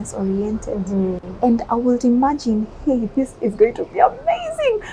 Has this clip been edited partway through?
no; 0 cuts

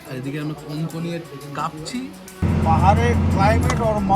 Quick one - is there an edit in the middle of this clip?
yes; 1 cut; at 2.4 s

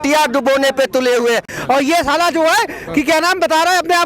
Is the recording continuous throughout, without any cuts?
no; 1 cut; at 1.5 s

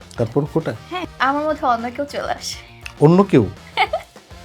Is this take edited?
yes; 1 cut; at 1.1 s

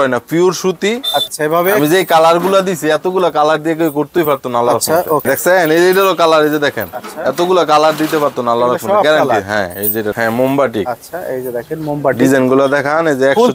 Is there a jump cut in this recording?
yes; 3 cuts; at 1.3 s, 5.2 s, 10.1 s

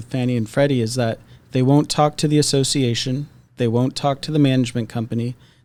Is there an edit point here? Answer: no; 0 cuts

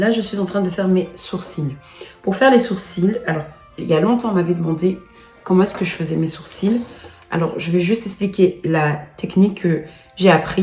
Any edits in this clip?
no; 0 cuts

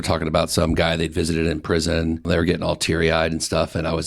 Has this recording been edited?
yes; 1 cut; at 2.2 s

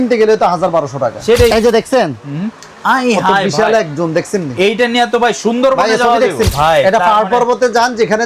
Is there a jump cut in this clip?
yes; 2 cuts; at 1.5 s, 6.5 s

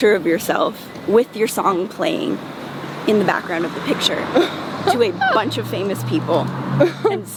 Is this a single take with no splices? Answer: yes; 0 cuts

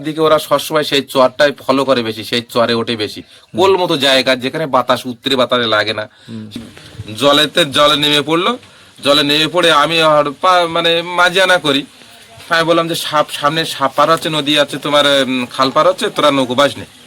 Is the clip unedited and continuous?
no; 1 cut; at 6.6 s

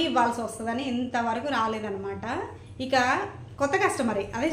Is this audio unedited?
yes; 0 cuts

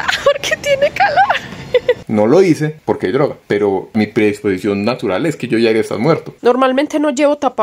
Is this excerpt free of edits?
no; 3 cuts; at 2.0 s, 3.9 s, 6.3 s

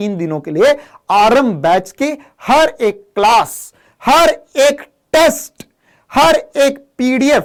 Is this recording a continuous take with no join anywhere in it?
yes; 0 cuts

